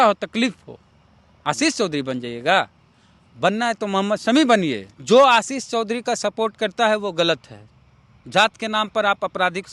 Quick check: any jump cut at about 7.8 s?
no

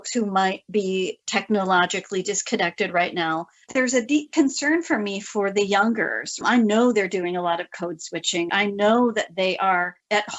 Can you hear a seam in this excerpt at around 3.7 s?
yes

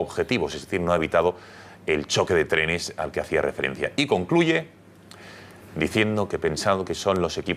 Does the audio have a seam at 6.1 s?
no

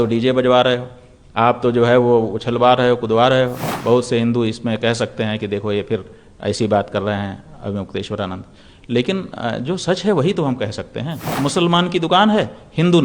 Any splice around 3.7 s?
yes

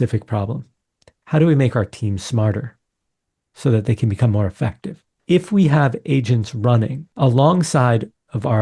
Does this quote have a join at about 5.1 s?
yes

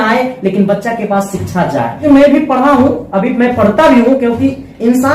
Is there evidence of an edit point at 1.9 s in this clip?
yes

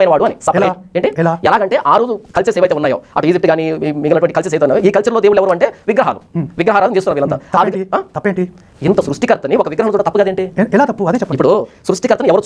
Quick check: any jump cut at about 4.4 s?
yes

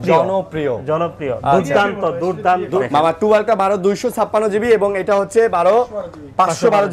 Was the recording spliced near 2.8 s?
yes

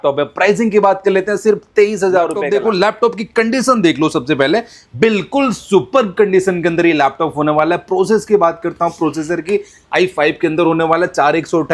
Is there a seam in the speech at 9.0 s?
no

